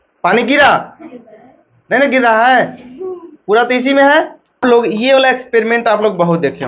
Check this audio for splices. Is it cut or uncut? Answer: uncut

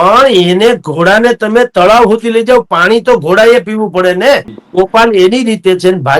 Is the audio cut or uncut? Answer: cut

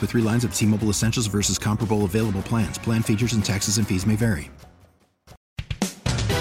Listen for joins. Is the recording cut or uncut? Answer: cut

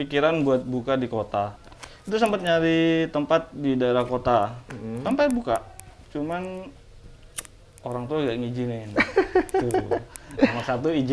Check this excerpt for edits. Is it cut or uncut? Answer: cut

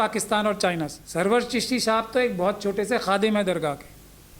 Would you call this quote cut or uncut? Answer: cut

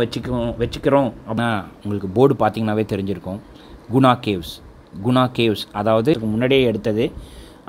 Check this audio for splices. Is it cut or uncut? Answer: cut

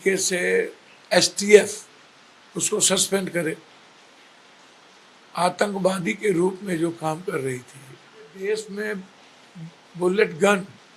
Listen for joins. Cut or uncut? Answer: cut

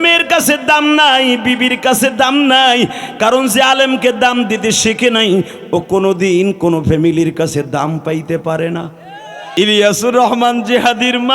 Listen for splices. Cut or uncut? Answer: cut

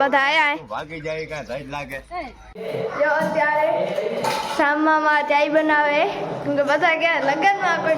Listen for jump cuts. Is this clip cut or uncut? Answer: cut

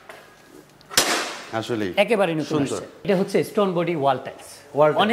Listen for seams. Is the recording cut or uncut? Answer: cut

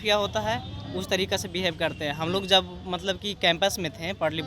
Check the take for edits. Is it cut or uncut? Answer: uncut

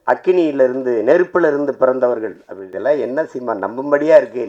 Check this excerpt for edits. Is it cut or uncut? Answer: cut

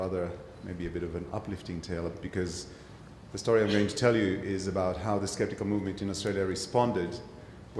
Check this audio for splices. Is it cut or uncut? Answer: cut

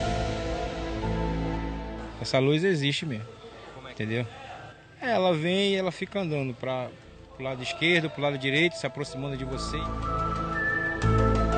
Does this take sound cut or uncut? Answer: uncut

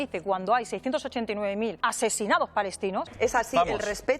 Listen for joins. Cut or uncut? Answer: cut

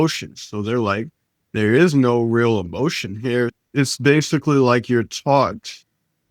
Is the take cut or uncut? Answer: cut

